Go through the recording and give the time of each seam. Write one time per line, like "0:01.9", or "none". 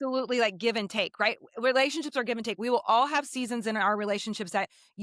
none